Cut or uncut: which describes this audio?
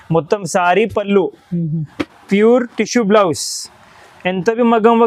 uncut